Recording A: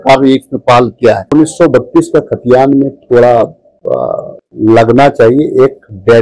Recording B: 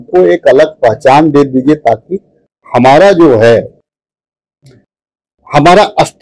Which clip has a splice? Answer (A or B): A